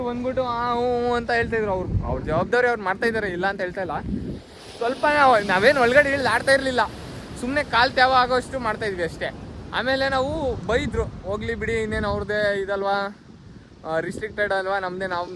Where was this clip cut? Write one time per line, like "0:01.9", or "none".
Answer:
none